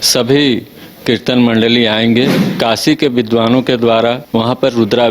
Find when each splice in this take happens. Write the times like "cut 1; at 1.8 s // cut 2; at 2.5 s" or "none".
cut 1; at 2.4 s // cut 2; at 4.2 s